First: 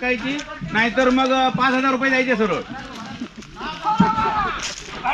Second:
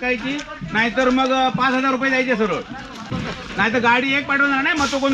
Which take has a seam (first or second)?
second